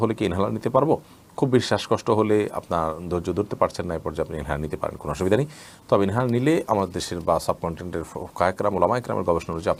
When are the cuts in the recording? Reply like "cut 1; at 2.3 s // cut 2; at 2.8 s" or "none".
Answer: none